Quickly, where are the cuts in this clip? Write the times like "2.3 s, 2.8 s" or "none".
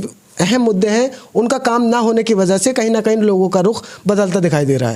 none